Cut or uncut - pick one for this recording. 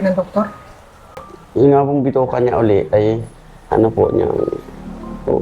uncut